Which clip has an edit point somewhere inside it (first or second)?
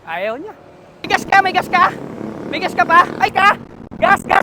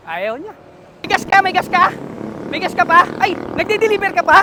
first